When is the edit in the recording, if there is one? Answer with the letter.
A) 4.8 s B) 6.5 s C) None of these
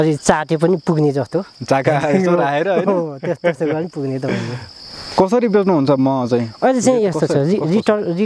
A